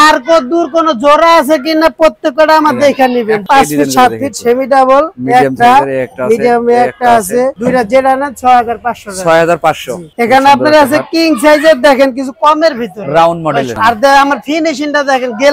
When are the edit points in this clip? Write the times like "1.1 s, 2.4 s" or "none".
3.4 s, 10.0 s, 13.7 s

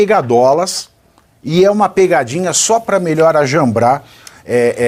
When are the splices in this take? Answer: none

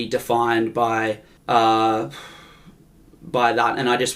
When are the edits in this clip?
1.3 s

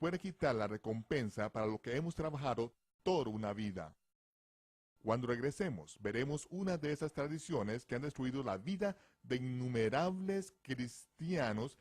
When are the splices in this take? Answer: 7.2 s

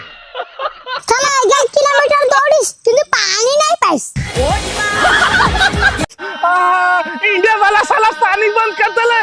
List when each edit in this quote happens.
6.0 s

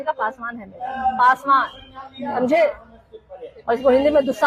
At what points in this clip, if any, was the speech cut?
none

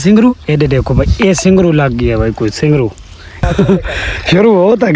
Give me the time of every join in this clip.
3.4 s

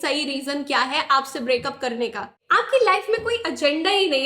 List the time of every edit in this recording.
2.3 s

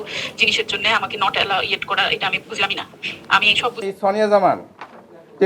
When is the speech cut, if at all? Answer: 3.8 s

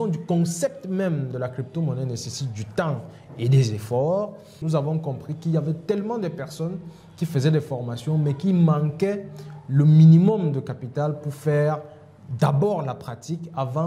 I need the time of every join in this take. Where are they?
4.6 s

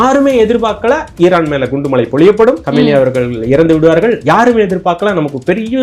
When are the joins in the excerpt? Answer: 1.1 s, 2.6 s

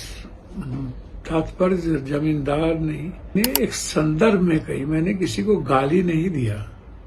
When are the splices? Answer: 3.3 s

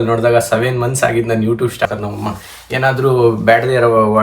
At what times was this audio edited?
1.9 s

